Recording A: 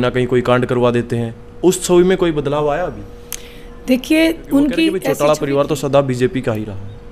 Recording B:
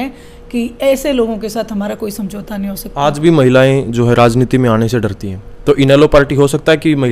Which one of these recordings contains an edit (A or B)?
A